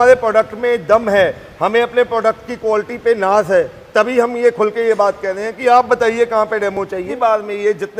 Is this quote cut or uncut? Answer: cut